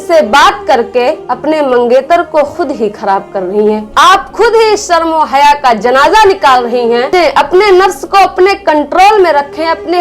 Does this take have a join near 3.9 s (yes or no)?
yes